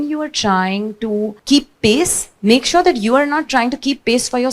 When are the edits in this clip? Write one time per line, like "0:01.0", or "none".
0:01.4